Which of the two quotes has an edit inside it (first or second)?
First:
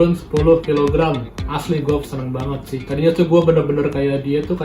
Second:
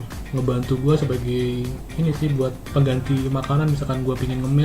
first